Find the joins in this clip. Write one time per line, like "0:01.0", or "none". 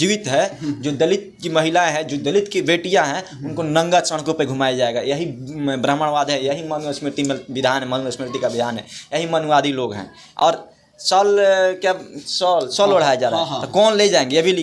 none